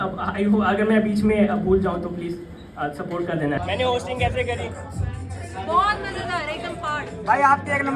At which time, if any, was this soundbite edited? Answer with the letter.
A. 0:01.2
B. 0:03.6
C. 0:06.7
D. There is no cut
B